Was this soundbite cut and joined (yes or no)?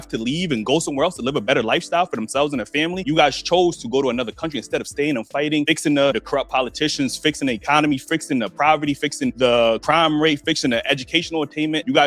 no